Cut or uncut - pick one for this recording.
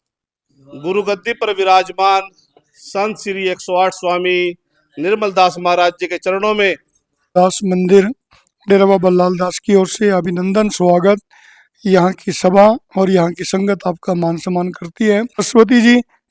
cut